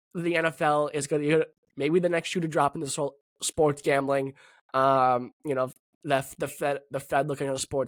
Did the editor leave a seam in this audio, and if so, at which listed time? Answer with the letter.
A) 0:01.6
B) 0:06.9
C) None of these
C